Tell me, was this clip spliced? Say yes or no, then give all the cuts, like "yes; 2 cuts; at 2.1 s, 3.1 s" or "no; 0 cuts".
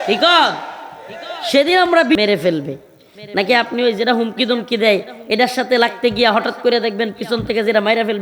yes; 1 cut; at 2.2 s